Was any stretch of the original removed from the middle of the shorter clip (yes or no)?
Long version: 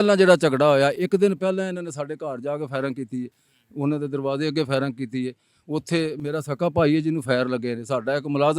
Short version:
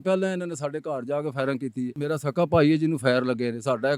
yes